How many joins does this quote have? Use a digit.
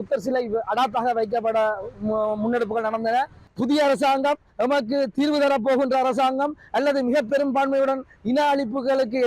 1